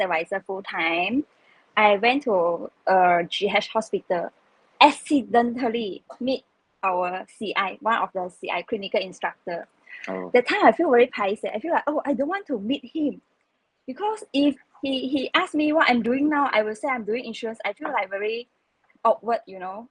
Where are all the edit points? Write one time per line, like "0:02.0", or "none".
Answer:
none